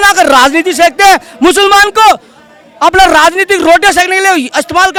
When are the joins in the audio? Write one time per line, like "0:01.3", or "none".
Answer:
none